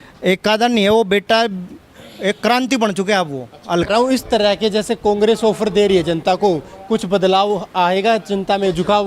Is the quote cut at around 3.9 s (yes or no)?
yes